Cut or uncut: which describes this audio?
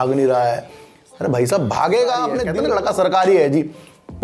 cut